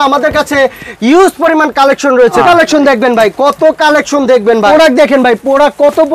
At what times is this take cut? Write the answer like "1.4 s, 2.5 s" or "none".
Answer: 2.4 s, 4.7 s

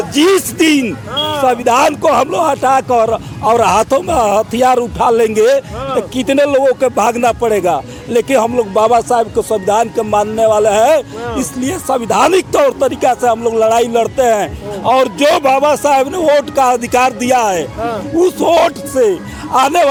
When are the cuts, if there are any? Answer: none

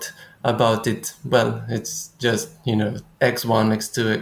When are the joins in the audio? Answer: none

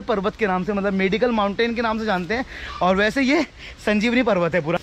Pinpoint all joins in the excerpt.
none

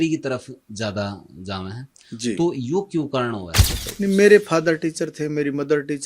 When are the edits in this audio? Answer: 3.8 s

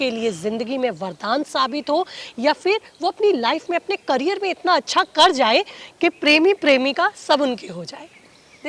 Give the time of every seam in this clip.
none

